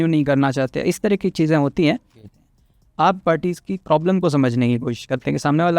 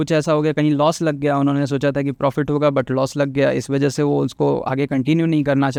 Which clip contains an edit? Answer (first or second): first